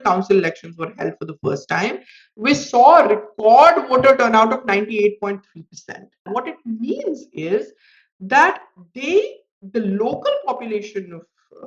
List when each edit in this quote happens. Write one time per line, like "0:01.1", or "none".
0:06.3